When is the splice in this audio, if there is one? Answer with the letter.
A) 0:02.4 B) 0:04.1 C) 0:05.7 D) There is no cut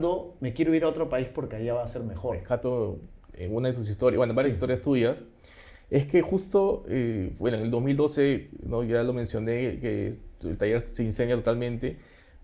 A